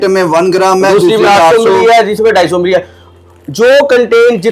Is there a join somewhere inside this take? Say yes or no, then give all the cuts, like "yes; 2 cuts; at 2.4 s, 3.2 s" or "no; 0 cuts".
no; 0 cuts